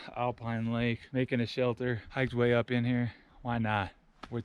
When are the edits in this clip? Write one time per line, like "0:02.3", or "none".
0:01.0
0:02.1
0:03.3